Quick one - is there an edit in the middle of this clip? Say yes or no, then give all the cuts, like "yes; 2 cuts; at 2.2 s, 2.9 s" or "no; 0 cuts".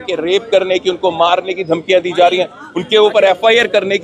no; 0 cuts